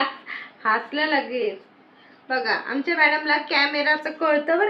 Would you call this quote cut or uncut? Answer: uncut